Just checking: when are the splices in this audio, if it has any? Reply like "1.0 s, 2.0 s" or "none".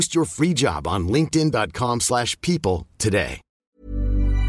3.5 s